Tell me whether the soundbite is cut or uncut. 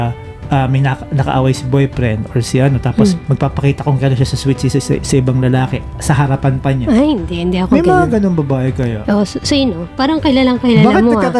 uncut